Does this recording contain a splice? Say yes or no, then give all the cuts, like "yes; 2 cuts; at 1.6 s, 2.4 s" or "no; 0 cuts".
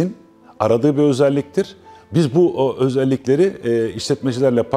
no; 0 cuts